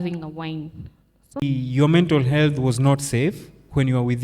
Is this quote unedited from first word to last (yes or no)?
no